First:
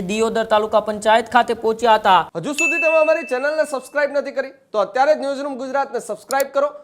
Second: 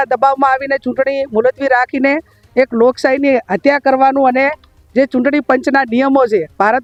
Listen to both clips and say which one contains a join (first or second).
first